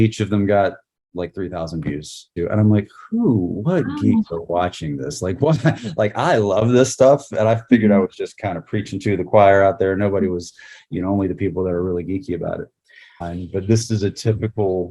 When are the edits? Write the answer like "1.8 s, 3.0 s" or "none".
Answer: 2.3 s, 13.2 s